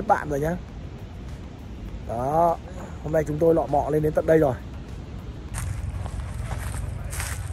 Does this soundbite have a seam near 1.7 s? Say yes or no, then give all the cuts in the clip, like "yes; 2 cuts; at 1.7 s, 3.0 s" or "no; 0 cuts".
no; 1 cut; at 5.5 s